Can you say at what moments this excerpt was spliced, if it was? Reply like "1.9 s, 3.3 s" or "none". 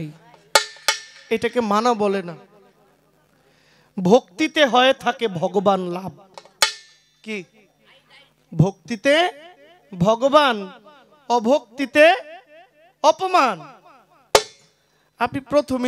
none